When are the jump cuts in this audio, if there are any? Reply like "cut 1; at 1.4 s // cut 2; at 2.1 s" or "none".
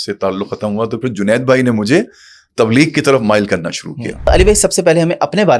cut 1; at 4.3 s